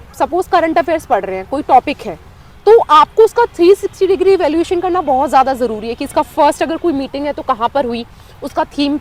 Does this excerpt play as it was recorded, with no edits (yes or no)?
yes